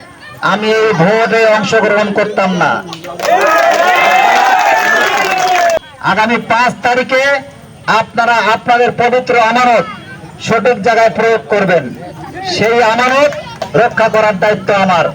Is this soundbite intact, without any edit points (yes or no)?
no